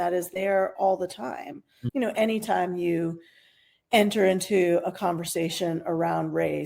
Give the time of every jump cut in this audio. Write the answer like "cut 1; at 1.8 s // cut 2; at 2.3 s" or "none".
cut 1; at 1.7 s